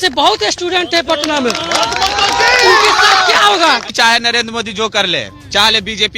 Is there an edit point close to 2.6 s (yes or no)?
no